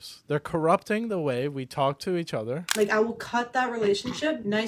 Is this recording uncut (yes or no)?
no